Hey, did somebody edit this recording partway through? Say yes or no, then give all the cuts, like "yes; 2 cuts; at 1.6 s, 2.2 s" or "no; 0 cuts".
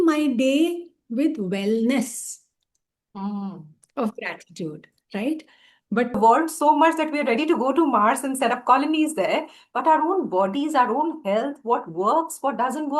yes; 1 cut; at 6.2 s